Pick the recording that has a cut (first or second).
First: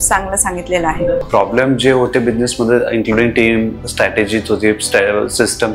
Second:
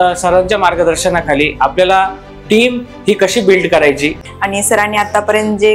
second